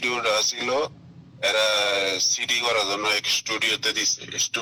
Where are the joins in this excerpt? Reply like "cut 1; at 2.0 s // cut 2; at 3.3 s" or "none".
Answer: none